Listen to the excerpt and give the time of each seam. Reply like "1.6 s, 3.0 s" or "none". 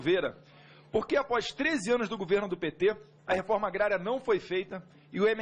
1.1 s

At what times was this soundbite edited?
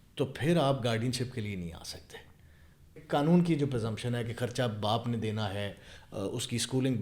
3.0 s

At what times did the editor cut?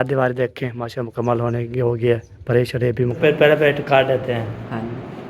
3.2 s

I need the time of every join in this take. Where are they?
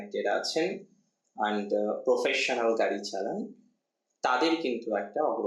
none

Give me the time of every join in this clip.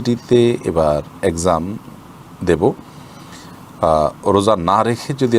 none

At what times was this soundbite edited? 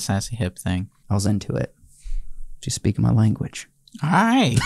0.9 s

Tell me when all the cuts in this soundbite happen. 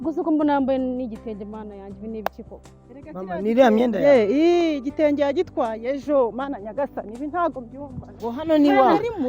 8.2 s

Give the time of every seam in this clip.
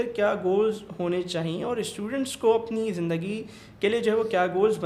none

